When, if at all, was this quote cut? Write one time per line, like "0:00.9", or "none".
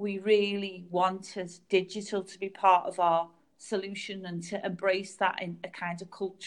none

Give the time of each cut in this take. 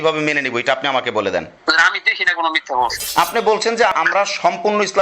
0:01.5
0:03.0
0:03.9

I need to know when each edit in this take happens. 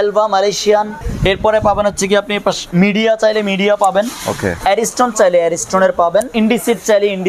0:01.0
0:02.6
0:04.5
0:06.3

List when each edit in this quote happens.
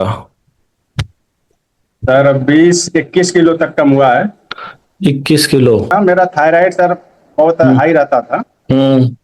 0:05.9

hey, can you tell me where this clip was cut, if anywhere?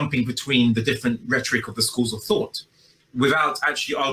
none

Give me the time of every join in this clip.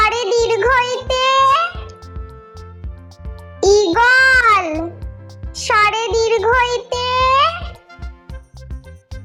none

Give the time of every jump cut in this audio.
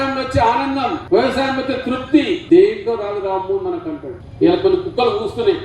0:01.0
0:02.4
0:04.2

